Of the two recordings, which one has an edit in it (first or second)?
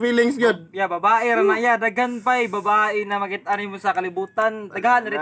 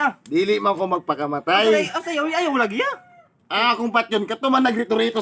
first